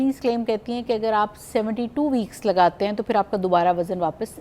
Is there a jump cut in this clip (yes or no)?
no